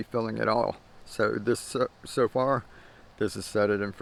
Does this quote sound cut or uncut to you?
uncut